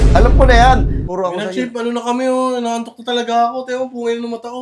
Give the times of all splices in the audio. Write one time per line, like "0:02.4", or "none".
0:01.0